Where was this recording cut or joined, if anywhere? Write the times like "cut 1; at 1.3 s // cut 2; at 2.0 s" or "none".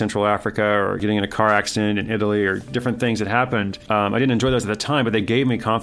cut 1; at 1.0 s // cut 2; at 3.8 s

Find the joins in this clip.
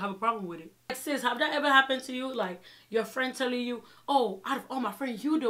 cut 1; at 1.0 s

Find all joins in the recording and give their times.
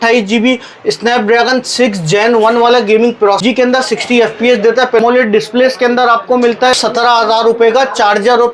cut 1; at 3.4 s // cut 2; at 5.0 s // cut 3; at 6.8 s

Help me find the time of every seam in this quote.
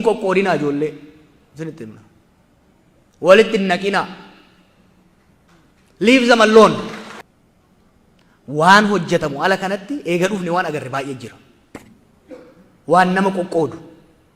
cut 1; at 7.2 s

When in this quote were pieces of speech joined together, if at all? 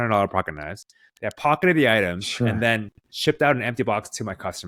none

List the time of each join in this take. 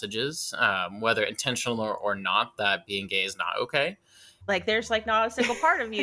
cut 1; at 4.4 s

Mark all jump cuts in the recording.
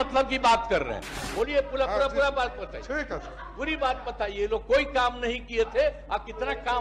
cut 1; at 1.2 s

